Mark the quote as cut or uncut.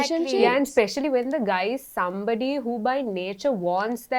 uncut